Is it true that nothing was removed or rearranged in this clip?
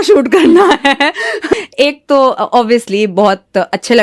no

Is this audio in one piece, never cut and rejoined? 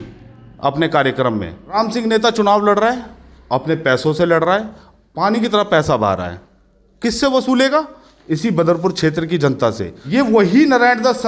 no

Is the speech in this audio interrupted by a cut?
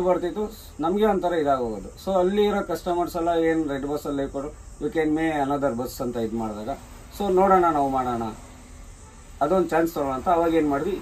no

